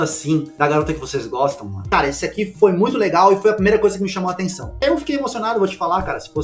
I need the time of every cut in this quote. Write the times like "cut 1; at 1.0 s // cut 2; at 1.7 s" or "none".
cut 1; at 1.8 s // cut 2; at 4.8 s